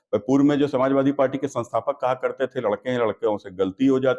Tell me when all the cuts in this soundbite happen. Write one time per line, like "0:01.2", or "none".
none